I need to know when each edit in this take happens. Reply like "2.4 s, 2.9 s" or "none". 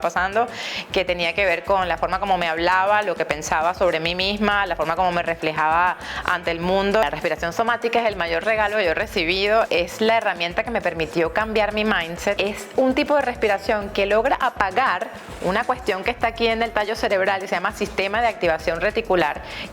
7.0 s, 9.7 s, 12.4 s